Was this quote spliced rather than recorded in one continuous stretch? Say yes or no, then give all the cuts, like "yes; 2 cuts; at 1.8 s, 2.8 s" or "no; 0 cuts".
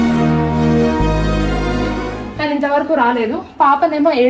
yes; 1 cut; at 2.2 s